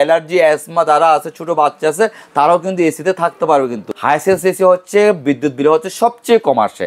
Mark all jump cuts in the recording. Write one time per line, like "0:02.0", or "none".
0:03.9